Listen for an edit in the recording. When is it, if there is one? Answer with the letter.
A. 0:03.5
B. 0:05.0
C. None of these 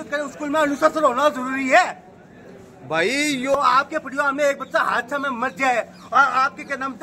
A